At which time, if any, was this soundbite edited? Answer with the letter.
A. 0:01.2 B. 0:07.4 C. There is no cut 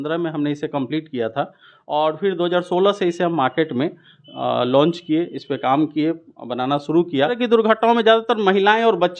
B